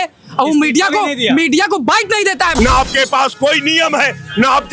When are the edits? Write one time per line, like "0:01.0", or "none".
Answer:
0:02.5